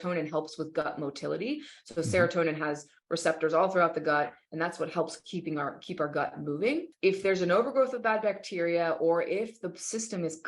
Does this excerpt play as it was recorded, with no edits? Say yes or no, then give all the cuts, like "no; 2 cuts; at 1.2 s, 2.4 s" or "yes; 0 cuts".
no; 1 cut; at 6.9 s